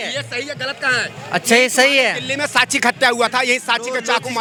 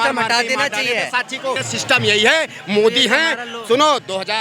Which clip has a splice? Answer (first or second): second